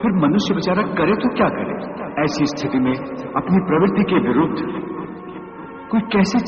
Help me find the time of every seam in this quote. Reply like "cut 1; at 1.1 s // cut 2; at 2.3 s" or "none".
cut 1; at 2.0 s